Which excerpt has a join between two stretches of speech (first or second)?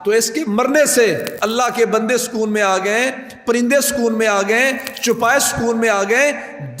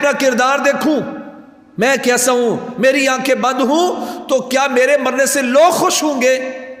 first